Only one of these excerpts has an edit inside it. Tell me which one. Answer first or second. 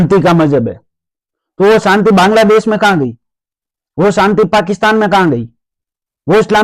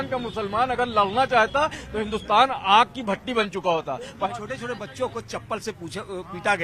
second